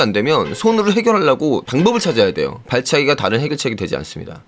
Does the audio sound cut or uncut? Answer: uncut